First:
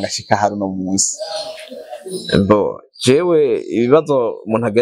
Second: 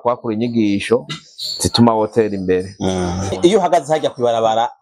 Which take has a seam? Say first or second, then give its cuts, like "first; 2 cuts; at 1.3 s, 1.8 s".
second; 1 cut; at 3.3 s